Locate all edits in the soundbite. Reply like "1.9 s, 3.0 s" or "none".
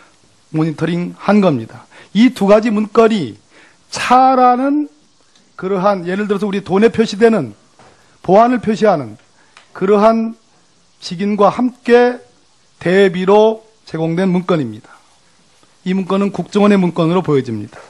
7.2 s